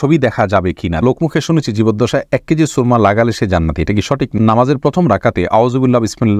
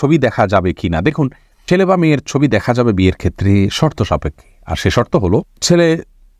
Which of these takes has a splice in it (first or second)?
first